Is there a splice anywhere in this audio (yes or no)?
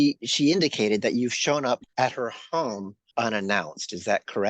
yes